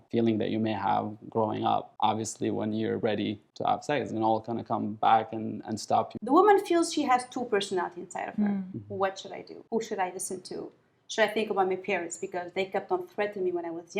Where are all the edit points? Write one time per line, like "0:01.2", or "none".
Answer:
0:03.5
0:06.1